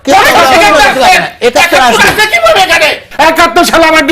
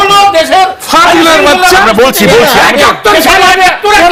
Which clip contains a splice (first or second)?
first